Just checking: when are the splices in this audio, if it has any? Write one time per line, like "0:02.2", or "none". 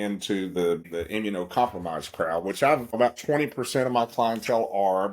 0:00.9
0:03.0